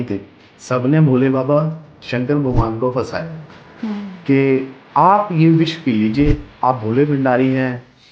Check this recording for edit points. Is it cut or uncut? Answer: uncut